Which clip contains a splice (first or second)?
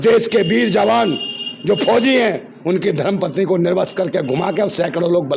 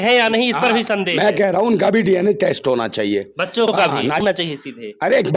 second